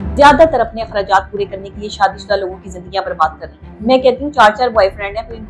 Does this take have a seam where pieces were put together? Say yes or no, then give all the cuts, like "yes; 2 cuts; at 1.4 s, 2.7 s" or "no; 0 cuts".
yes; 1 cut; at 3.7 s